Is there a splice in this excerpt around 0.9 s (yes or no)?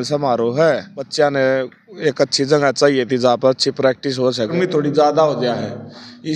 yes